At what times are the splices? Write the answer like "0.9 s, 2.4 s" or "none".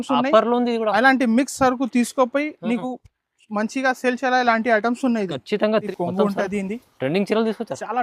5.7 s